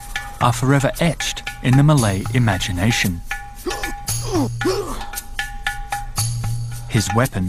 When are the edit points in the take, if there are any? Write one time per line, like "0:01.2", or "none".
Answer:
0:01.7